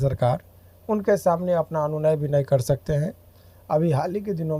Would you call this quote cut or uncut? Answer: uncut